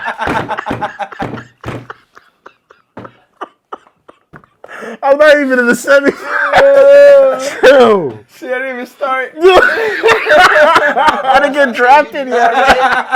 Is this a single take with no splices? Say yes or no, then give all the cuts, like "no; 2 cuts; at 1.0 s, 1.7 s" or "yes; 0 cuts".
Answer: yes; 0 cuts